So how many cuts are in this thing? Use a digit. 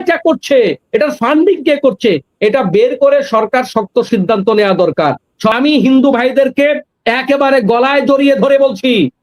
1